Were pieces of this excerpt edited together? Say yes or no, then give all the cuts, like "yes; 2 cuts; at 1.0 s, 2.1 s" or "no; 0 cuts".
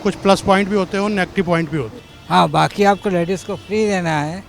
yes; 1 cut; at 2.0 s